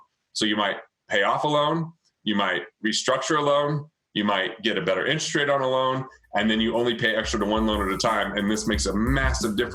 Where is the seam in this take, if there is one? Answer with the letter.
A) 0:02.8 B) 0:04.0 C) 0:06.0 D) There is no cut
D